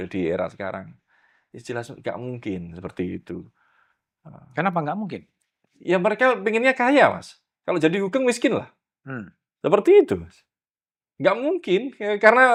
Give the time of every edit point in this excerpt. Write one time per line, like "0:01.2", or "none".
none